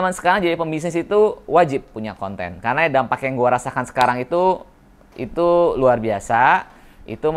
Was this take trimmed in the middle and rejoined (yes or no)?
no